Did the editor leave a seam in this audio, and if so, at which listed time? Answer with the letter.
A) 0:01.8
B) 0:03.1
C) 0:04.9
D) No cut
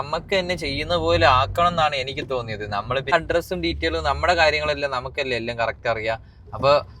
B